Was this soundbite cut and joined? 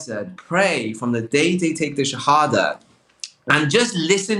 no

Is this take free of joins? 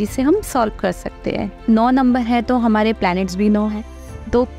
no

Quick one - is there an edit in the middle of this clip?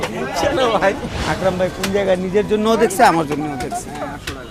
yes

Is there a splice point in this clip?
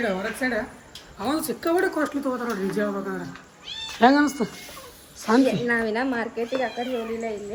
no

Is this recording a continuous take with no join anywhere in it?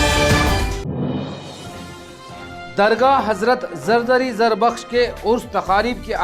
no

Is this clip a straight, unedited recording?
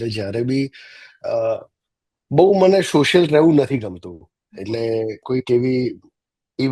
yes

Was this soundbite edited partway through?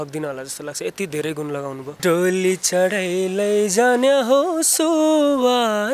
yes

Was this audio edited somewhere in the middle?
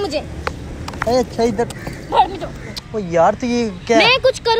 yes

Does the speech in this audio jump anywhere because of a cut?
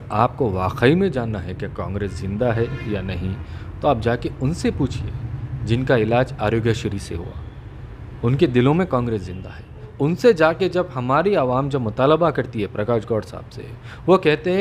yes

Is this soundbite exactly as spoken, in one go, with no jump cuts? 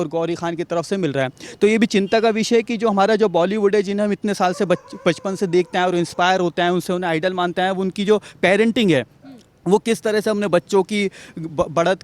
yes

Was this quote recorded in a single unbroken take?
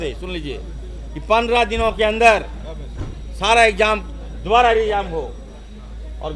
yes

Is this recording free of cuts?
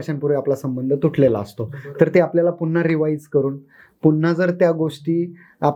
yes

